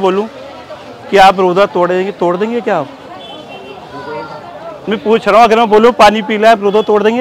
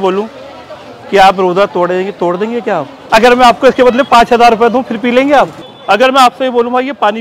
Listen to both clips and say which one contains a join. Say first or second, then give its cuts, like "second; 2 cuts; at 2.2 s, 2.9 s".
second; 2 cuts; at 3.0 s, 5.7 s